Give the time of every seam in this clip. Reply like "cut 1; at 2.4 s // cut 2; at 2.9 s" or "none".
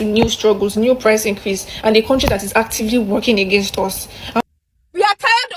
cut 1; at 4.4 s